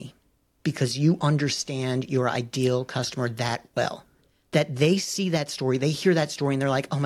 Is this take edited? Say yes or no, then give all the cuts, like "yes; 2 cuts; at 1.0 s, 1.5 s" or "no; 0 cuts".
no; 0 cuts